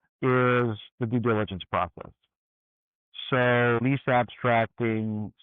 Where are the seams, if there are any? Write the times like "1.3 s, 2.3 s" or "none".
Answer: 3.8 s